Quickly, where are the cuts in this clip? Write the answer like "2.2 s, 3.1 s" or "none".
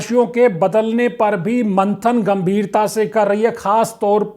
none